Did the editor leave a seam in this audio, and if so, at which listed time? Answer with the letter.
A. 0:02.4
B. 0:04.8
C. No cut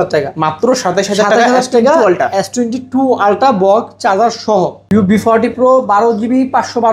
B